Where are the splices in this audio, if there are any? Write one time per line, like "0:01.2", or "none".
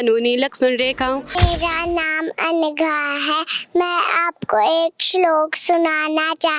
0:01.4